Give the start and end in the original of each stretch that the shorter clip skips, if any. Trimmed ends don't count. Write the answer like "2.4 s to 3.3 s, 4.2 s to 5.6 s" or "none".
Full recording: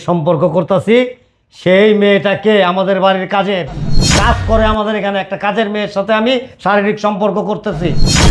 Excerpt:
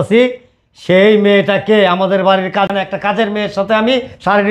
3.5 s to 5.1 s